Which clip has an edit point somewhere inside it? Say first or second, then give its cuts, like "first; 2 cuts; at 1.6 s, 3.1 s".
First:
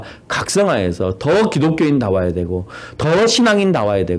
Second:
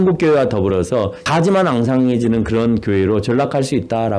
second; 1 cut; at 1.2 s